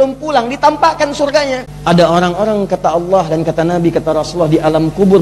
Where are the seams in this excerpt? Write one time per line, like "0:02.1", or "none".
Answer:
0:01.7